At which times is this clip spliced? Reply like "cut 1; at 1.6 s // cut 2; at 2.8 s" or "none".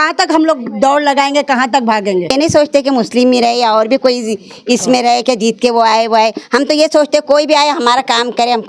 cut 1; at 2.3 s